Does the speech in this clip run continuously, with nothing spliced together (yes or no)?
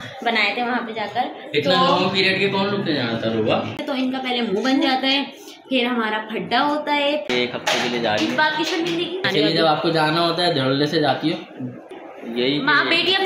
no